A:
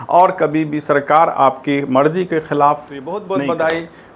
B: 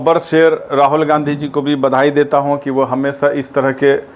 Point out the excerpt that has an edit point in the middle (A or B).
A